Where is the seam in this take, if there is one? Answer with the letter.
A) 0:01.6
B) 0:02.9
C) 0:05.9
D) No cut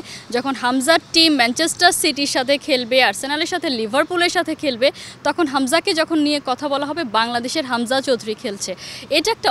D